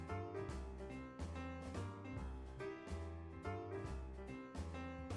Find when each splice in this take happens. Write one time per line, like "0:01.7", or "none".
none